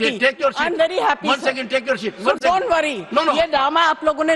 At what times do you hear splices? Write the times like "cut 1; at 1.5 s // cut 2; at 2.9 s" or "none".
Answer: none